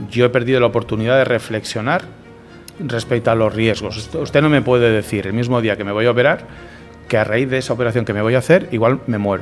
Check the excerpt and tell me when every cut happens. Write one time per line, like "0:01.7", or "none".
none